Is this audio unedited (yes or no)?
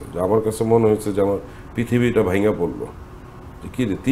yes